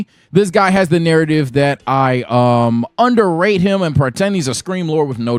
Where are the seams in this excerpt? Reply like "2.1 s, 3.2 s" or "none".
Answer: none